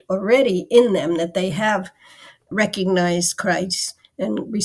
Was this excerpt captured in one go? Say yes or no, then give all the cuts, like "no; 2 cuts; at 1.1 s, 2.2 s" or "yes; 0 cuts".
no; 1 cut; at 2.5 s